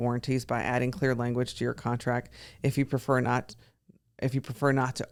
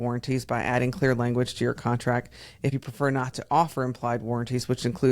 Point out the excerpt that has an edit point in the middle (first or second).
second